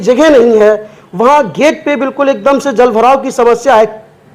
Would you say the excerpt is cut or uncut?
uncut